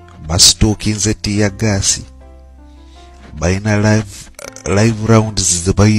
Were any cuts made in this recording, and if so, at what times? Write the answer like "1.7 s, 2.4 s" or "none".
none